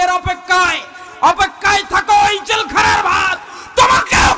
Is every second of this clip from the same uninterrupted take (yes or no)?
yes